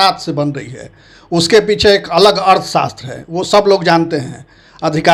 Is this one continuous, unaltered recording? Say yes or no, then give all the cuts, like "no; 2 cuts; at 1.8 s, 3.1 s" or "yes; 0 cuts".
yes; 0 cuts